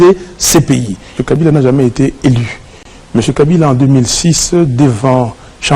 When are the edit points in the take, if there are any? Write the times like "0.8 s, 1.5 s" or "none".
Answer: 1.4 s